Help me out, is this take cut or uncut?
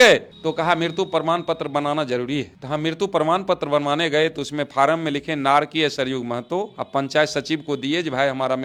uncut